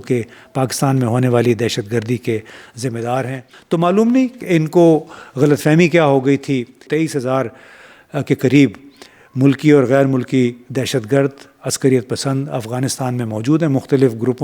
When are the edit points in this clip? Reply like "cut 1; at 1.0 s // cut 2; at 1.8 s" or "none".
cut 1; at 3.5 s // cut 2; at 6.9 s